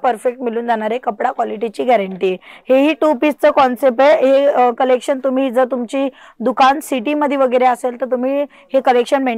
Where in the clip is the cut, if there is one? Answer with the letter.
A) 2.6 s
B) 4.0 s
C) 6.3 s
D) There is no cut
D